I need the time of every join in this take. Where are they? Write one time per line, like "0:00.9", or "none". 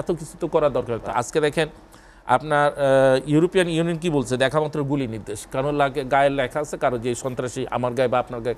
0:01.0